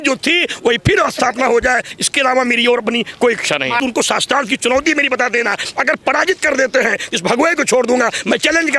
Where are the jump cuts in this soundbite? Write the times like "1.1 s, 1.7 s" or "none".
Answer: 3.8 s